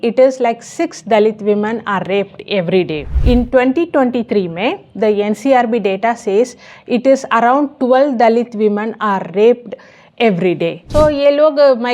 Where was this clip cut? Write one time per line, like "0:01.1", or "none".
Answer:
0:03.1
0:10.8